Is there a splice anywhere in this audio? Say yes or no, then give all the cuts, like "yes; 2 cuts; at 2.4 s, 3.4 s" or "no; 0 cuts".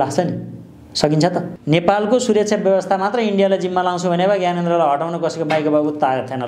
yes; 1 cut; at 1.5 s